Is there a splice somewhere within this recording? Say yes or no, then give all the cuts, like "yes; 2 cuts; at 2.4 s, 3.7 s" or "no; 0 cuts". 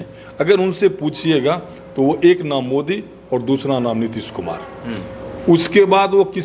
no; 0 cuts